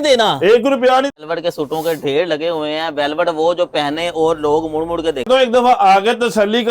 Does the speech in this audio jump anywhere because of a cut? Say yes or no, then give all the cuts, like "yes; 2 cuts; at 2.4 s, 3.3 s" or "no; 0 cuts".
yes; 2 cuts; at 1.1 s, 5.3 s